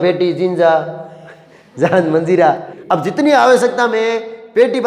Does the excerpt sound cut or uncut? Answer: cut